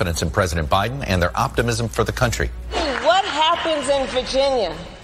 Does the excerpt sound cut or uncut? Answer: cut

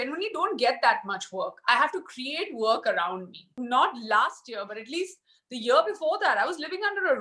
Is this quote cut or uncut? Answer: cut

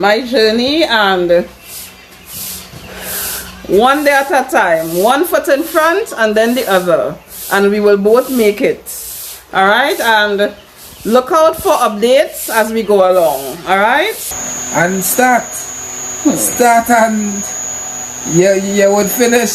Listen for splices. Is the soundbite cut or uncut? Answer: cut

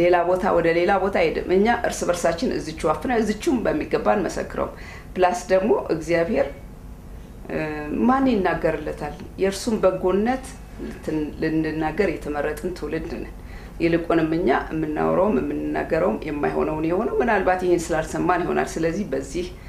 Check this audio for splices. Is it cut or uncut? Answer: uncut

